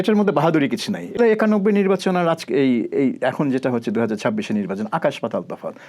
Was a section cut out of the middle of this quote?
yes; 1 cut; at 1.2 s

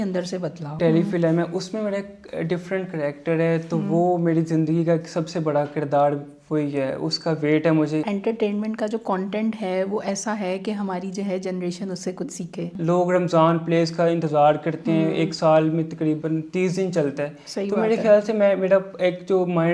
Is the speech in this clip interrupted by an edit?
yes; 3 cuts; at 0.8 s, 8.0 s, 12.8 s

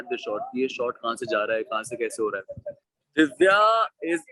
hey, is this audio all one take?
no; 1 cut; at 2.9 s

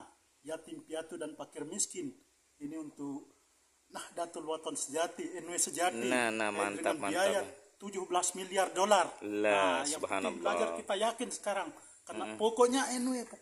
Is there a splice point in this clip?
no; 0 cuts

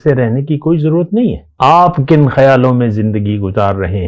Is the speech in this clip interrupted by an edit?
yes; 1 cut; at 1.4 s

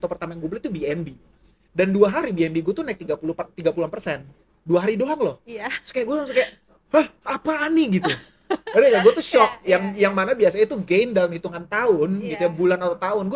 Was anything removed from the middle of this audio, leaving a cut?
no; 0 cuts

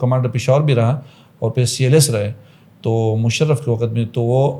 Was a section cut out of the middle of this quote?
no; 0 cuts

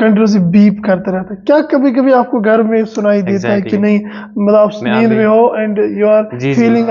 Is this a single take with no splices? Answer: yes; 0 cuts

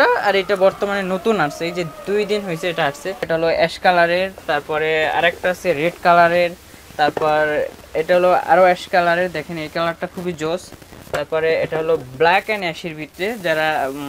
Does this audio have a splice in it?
yes; 1 cut; at 3.3 s

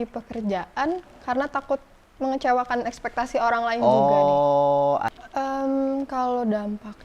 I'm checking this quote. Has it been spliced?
yes; 1 cut; at 5.1 s

